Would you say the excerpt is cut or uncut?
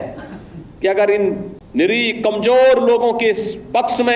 cut